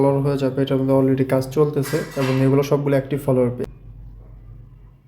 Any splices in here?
yes; 1 cut; at 3.6 s

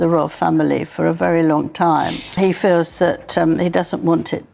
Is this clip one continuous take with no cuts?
no; 1 cut; at 2.2 s

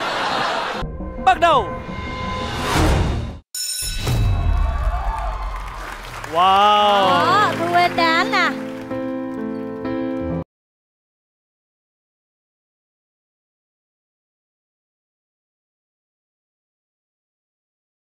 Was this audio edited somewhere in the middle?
no; 0 cuts

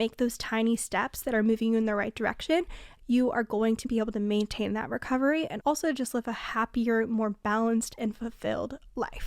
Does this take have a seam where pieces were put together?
yes; 2 cuts; at 2.8 s, 3.9 s

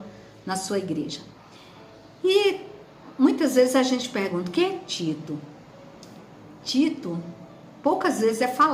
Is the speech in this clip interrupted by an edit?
no; 0 cuts

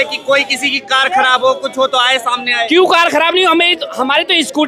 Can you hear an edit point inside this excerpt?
no; 0 cuts

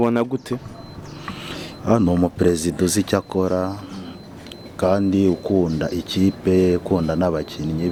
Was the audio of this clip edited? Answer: no; 0 cuts

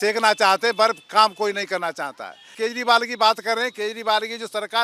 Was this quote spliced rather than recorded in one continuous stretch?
yes; 1 cut; at 2.5 s

